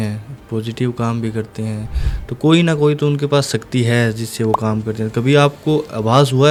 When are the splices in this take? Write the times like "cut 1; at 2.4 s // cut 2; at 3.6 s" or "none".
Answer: none